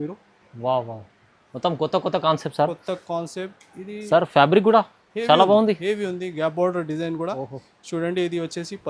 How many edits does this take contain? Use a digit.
0